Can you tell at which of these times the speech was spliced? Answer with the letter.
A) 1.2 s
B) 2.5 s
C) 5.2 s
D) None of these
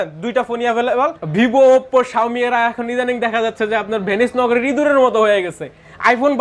A